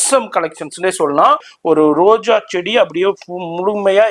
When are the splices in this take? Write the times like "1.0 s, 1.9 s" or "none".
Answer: 1.5 s